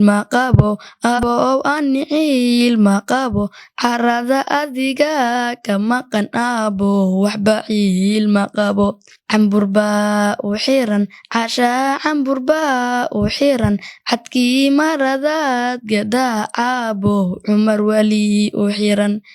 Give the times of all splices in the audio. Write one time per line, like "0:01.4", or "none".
0:01.2